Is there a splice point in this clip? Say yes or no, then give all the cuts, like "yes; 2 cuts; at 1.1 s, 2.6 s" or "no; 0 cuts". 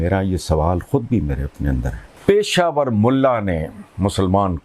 yes; 1 cut; at 2.0 s